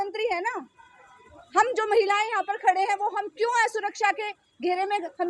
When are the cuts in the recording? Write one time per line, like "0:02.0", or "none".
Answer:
none